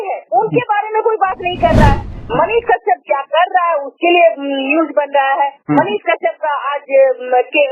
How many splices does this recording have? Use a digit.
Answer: 1